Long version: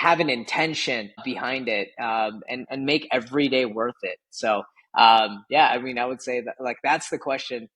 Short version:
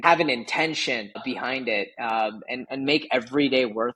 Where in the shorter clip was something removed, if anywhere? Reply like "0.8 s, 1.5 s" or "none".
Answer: none